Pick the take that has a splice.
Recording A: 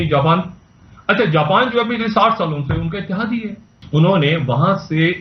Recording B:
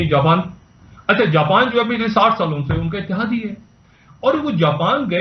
A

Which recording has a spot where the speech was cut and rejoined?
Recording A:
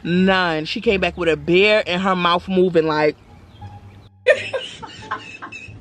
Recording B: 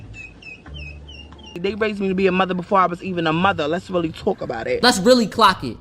B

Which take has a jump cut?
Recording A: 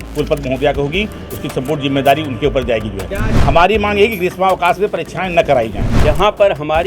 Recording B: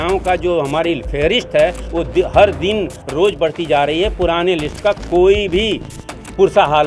A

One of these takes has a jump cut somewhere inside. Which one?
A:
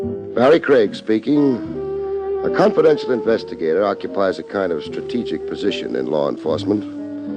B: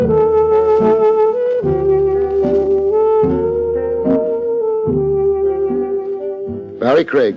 B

